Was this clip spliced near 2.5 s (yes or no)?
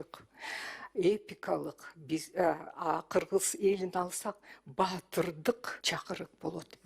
no